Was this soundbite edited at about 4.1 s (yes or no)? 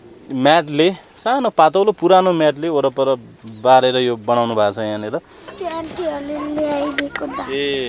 no